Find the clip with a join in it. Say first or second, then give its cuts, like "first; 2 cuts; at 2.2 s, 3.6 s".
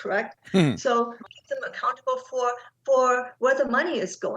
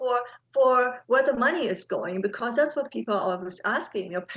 first; 1 cut; at 1.3 s